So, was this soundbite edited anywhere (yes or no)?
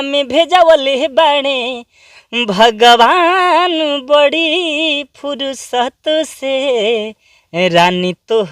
no